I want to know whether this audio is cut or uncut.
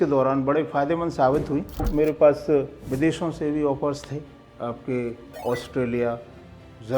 cut